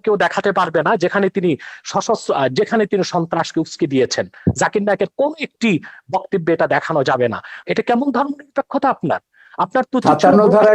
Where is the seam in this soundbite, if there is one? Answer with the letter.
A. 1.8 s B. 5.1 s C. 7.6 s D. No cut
C